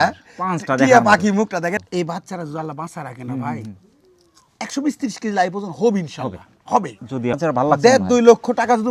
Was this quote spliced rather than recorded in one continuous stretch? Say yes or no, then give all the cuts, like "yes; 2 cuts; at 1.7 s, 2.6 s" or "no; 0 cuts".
yes; 2 cuts; at 1.8 s, 7.4 s